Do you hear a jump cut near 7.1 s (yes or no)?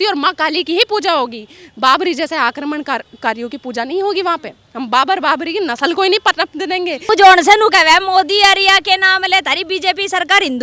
yes